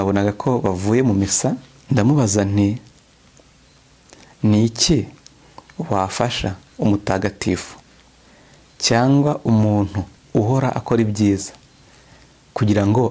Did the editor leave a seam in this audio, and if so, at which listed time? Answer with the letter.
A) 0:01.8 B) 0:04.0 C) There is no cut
A